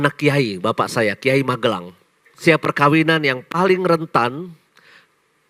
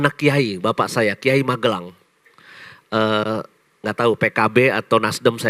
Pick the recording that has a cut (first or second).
first